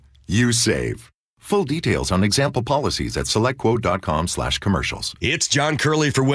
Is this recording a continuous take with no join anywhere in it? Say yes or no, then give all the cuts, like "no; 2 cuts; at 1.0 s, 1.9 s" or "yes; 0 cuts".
yes; 0 cuts